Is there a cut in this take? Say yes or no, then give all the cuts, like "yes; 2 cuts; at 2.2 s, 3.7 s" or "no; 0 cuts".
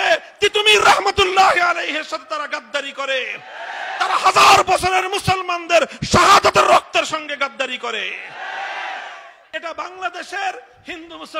yes; 1 cut; at 9.3 s